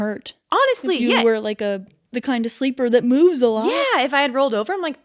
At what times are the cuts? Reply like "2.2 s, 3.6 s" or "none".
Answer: 1.9 s